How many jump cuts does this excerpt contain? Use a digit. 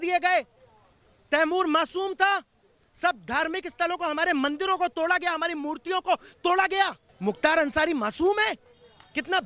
1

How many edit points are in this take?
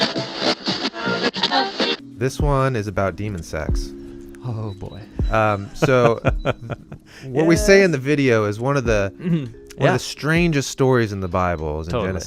1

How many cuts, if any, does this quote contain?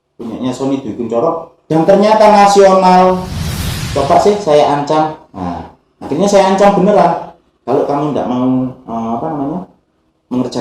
1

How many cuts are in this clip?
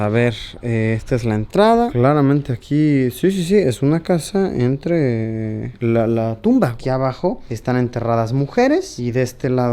2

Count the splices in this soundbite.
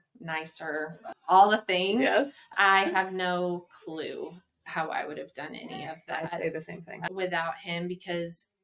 3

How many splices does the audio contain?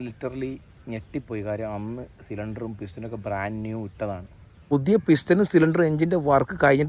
1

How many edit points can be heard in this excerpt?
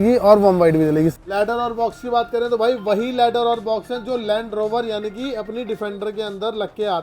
1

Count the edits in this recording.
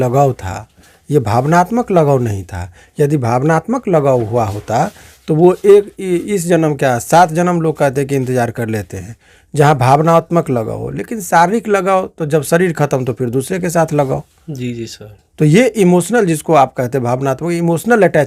0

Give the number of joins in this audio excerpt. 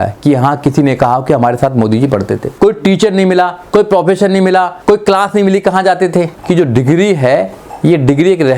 3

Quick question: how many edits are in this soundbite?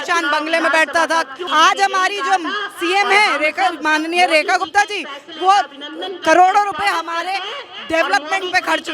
1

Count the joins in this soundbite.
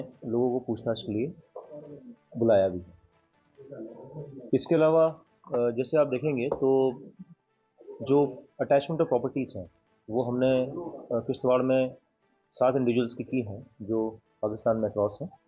0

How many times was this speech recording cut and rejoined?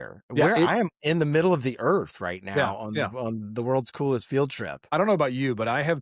1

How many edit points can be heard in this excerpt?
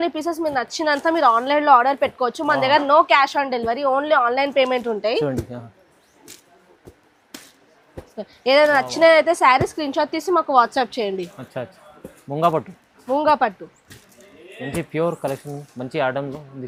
0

